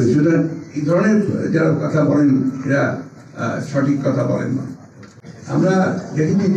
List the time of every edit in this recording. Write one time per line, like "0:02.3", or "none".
none